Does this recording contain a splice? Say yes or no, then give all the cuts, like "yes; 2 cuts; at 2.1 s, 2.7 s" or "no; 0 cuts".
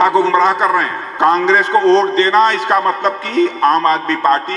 yes; 1 cut; at 1.0 s